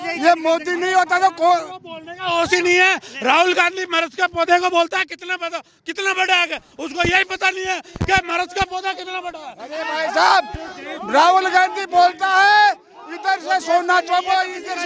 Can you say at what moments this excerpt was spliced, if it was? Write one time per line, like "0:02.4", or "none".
none